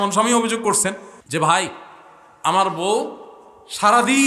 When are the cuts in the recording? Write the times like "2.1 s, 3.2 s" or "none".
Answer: 1.1 s